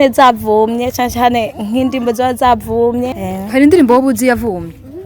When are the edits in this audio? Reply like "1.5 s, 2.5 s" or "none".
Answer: 3.1 s